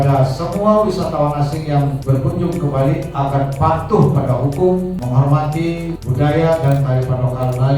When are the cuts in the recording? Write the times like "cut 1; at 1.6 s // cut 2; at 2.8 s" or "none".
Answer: cut 1; at 2.0 s // cut 2; at 5.0 s // cut 3; at 6.0 s